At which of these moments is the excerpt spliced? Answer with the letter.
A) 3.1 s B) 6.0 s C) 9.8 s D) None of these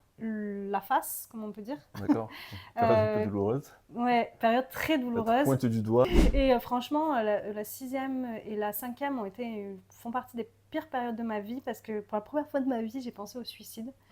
B